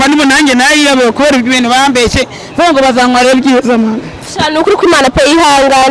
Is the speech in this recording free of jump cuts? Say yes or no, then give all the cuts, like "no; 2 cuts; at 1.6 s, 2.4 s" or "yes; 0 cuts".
yes; 0 cuts